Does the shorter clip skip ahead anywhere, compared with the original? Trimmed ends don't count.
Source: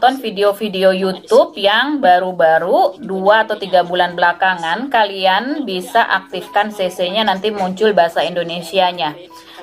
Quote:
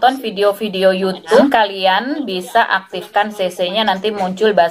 yes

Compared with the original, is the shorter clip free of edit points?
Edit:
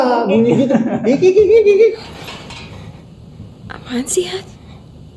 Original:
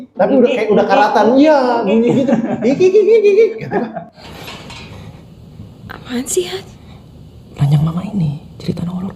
no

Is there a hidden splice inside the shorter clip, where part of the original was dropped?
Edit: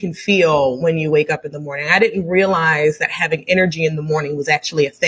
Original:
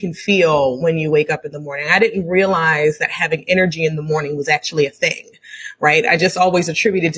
no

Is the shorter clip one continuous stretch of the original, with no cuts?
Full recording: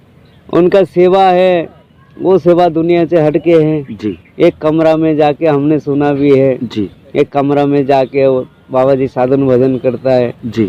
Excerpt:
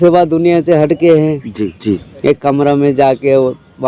no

